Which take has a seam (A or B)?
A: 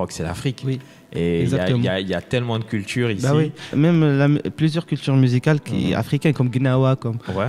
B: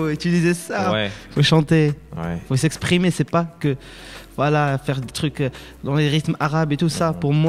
A